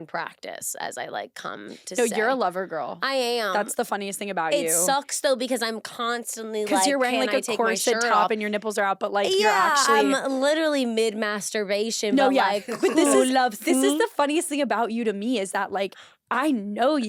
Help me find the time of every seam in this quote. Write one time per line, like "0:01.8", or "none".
none